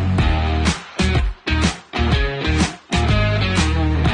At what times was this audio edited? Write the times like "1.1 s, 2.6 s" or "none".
none